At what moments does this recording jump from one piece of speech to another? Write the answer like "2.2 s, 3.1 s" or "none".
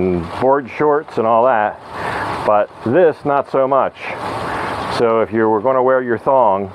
none

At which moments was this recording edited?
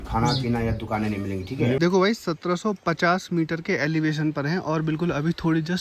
1.8 s

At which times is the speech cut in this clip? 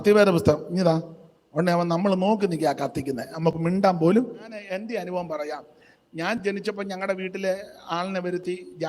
4.6 s

